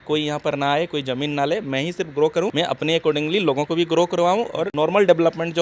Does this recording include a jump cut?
yes; 2 cuts; at 2.5 s, 4.6 s

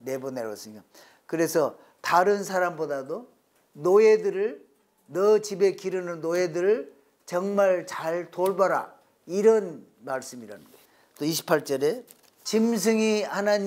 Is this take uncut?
yes; 0 cuts

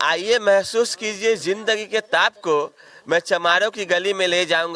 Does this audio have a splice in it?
no; 0 cuts

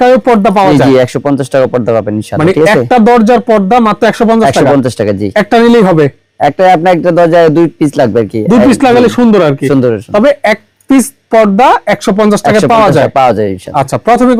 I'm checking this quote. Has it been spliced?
no; 0 cuts

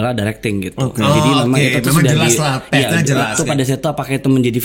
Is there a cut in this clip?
yes; 1 cut; at 3.3 s

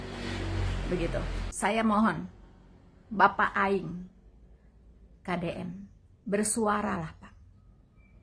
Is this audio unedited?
no; 1 cut; at 1.4 s

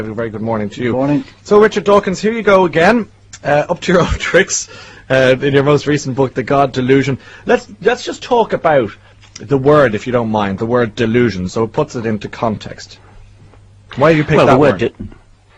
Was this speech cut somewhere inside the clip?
yes; 1 cut; at 1.3 s

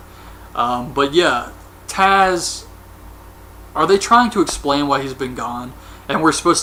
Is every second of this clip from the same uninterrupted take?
yes; 0 cuts

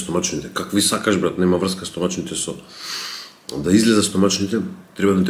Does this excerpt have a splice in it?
no; 0 cuts

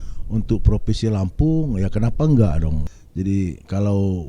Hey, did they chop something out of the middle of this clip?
yes; 1 cut; at 2.8 s

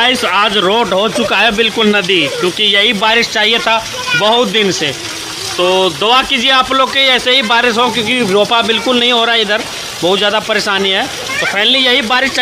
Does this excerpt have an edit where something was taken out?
no; 0 cuts

